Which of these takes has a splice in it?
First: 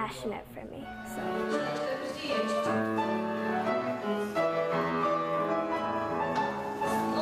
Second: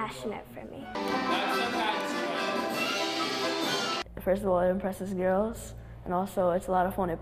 second; 2 cuts; at 1.0 s, 4.0 s

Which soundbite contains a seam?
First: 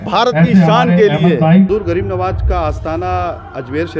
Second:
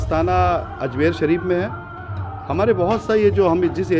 first; 1 cut; at 1.7 s

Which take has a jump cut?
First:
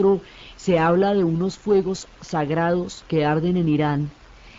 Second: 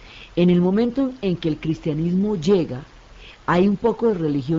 second; 1 cut; at 1.4 s

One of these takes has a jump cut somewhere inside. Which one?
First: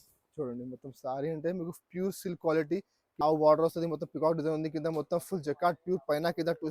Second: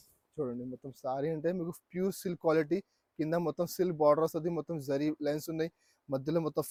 first; 1 cut; at 3.0 s

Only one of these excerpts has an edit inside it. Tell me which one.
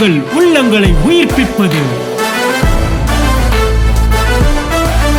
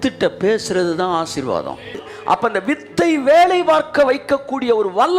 second; 1 cut; at 2.1 s

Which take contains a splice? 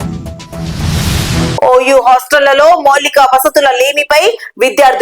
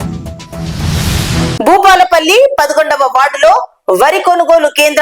first; 1 cut; at 1.5 s

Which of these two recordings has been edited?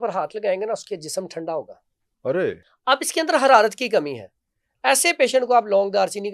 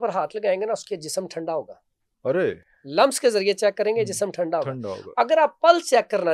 first; 1 cut; at 2.7 s

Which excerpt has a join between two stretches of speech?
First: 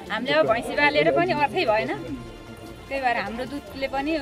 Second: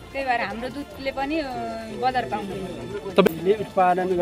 second; 1 cut; at 3.3 s

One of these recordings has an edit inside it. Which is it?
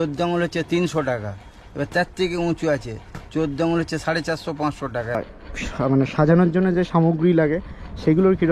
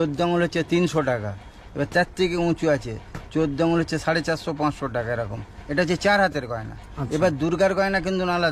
first; 1 cut; at 5.4 s

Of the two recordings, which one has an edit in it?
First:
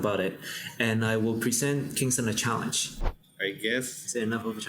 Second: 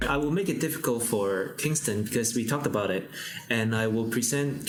first; 1 cut; at 2.9 s

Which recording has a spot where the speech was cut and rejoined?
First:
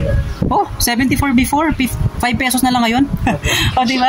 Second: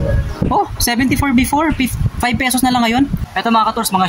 second; 1 cut; at 3.2 s

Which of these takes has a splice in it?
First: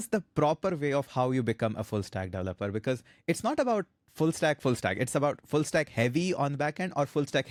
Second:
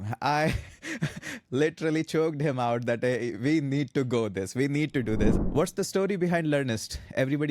second; 1 cut; at 5.4 s

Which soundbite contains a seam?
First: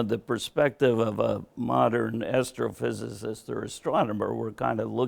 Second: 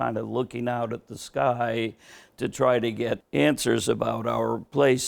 second; 1 cut; at 3.2 s

